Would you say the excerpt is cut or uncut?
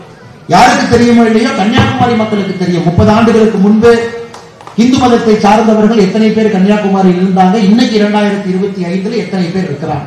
uncut